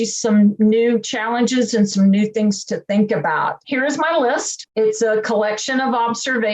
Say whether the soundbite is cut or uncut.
cut